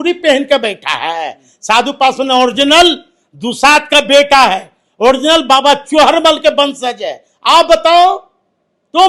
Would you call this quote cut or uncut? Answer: uncut